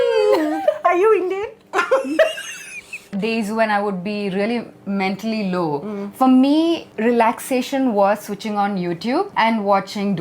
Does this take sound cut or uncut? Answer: cut